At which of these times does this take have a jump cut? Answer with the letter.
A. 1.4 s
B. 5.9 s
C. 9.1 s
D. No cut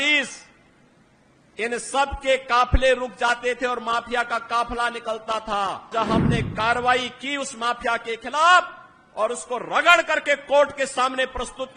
B